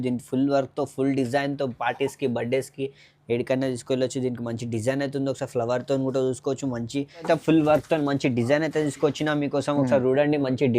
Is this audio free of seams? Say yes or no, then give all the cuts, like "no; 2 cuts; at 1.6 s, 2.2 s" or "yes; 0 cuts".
no; 1 cut; at 7.3 s